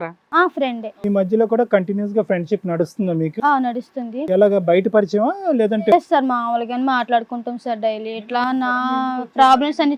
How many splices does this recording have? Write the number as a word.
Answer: zero